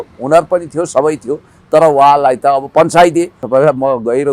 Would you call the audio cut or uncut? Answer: cut